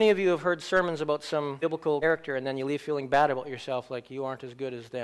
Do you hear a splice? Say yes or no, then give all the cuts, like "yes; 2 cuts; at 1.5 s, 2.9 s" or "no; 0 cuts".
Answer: yes; 1 cut; at 2.0 s